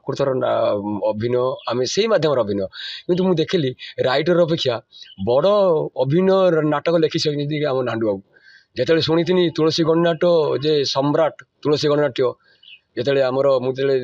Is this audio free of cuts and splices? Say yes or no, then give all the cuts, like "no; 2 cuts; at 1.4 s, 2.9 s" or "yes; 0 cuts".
yes; 0 cuts